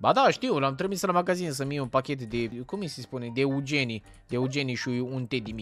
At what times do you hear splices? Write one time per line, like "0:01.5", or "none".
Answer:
0:02.6